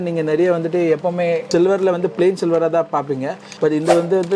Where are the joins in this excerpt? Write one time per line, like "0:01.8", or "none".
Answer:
none